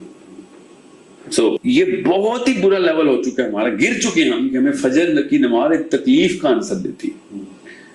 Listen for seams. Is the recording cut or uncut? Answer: cut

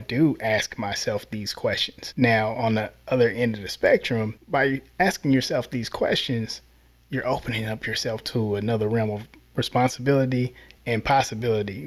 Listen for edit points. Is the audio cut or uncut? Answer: cut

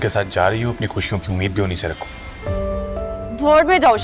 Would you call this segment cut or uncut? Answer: cut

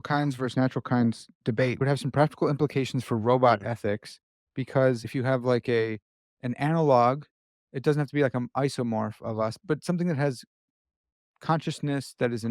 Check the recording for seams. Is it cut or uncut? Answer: cut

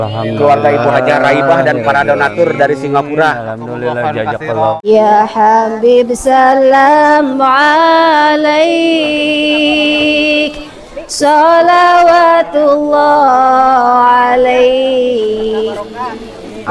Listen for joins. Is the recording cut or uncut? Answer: cut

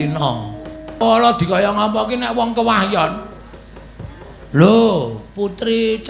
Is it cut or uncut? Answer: cut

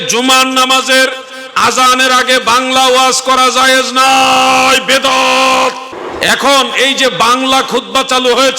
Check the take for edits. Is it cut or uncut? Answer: cut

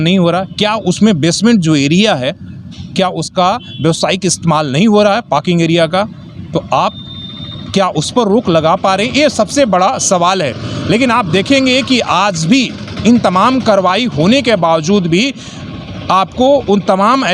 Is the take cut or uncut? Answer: uncut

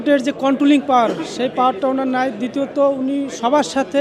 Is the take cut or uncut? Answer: uncut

